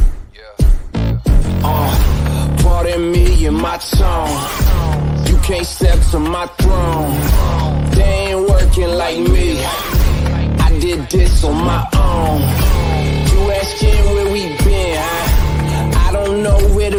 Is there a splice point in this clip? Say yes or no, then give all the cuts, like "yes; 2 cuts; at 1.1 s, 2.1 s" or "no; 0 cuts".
no; 0 cuts